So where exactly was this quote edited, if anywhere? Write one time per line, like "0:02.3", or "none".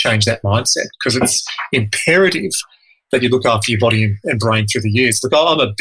none